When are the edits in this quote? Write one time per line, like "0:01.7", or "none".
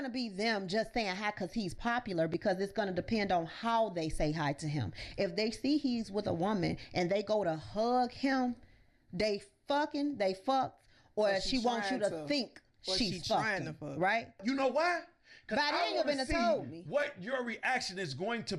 0:14.4